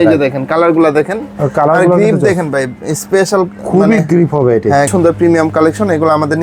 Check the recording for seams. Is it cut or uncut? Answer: cut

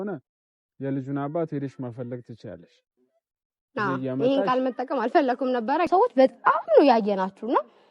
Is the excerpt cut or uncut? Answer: cut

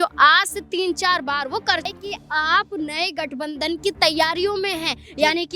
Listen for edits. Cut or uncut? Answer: cut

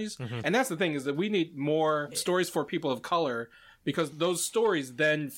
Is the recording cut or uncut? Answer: cut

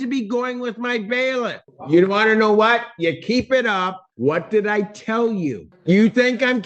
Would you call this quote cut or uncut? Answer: cut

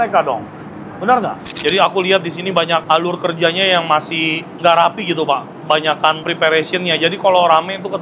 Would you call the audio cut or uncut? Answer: cut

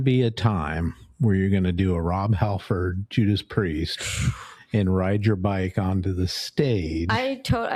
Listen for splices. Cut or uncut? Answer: uncut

